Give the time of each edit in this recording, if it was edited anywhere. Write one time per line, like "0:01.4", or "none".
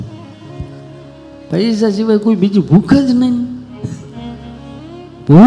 0:01.3